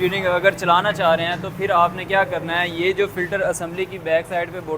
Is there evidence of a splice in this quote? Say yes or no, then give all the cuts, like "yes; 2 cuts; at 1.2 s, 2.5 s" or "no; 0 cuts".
no; 0 cuts